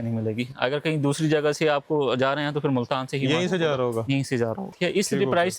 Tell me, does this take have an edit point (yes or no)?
yes